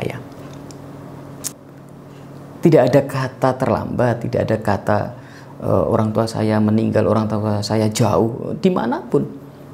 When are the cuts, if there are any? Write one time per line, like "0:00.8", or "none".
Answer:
0:01.5